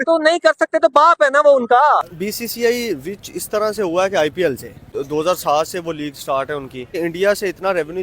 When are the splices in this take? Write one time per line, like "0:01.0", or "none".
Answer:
0:02.2
0:05.0
0:07.0